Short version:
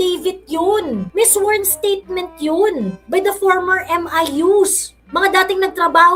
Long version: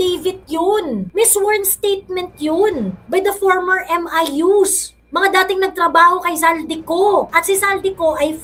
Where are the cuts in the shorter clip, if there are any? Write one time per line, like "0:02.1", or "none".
none